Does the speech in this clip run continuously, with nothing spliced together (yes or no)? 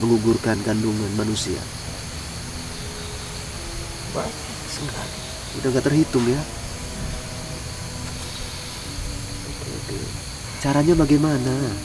yes